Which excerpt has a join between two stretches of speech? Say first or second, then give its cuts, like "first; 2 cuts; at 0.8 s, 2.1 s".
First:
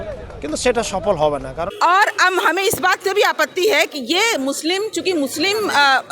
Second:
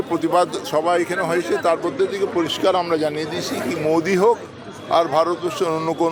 first; 1 cut; at 1.6 s